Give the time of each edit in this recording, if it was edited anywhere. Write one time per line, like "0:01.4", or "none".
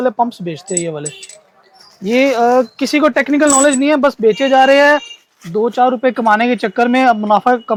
none